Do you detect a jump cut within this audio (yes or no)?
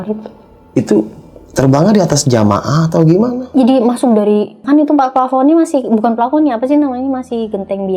yes